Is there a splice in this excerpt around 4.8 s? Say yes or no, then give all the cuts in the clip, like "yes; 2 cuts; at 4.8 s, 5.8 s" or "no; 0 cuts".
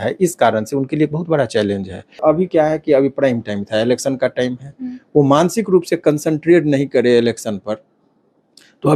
no; 1 cut; at 2.2 s